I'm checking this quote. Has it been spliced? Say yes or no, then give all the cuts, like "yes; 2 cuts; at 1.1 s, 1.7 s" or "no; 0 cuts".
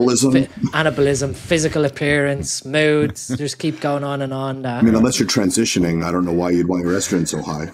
no; 0 cuts